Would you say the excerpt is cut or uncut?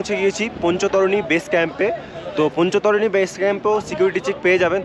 uncut